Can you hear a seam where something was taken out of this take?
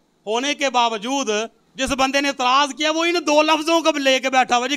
yes; 1 cut; at 1.6 s

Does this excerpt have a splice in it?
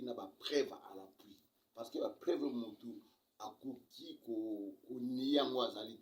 no; 0 cuts

